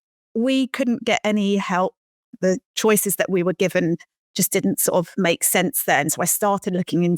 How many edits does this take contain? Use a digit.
1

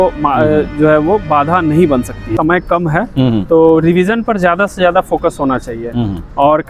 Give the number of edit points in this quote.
1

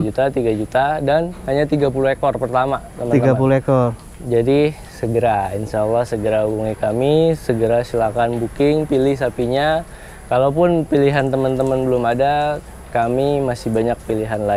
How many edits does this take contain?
0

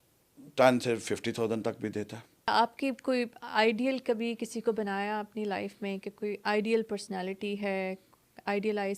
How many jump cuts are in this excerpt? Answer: 1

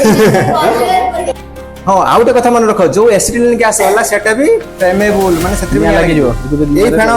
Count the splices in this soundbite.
1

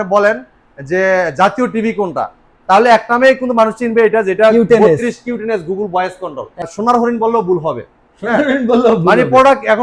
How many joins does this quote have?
1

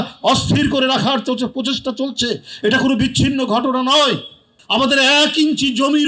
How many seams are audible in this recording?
1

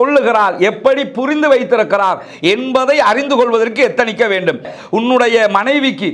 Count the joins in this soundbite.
1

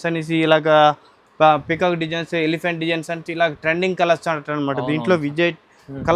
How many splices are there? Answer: 0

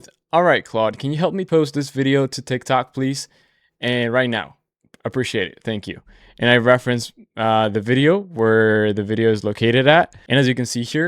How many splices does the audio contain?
2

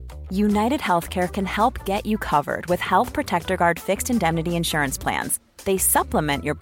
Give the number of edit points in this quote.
0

